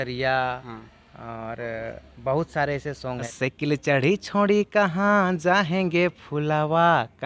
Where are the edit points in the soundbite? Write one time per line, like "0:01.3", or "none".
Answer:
0:03.2